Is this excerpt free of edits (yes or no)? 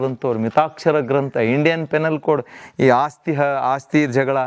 yes